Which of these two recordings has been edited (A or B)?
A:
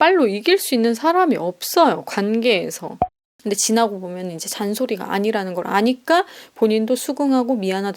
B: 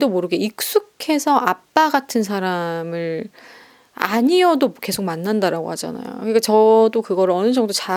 A